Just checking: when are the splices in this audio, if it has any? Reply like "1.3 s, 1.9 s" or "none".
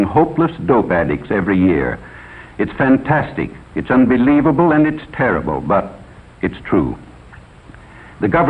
none